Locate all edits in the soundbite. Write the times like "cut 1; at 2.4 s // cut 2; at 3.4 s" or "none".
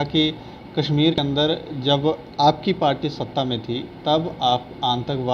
cut 1; at 1.2 s